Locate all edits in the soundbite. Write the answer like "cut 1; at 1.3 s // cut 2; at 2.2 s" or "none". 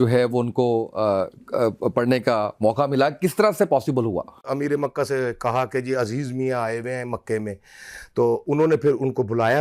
cut 1; at 4.3 s